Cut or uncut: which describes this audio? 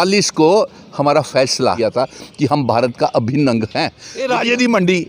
cut